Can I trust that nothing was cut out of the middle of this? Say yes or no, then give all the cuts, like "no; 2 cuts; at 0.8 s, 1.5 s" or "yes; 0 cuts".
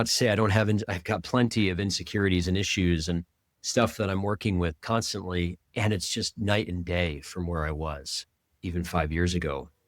yes; 0 cuts